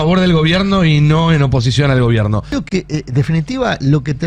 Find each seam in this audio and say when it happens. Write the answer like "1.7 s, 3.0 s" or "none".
2.5 s